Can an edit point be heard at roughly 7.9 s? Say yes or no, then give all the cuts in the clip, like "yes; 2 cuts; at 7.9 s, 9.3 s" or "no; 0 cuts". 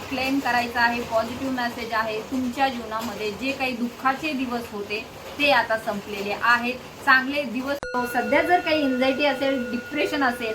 yes; 1 cut; at 7.9 s